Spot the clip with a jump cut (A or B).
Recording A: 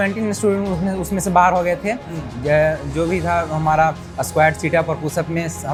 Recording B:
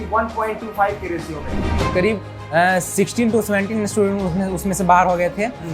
B